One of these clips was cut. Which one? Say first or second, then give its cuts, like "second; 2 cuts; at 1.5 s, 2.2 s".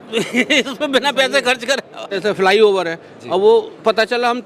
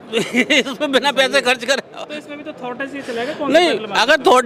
first; 1 cut; at 2.2 s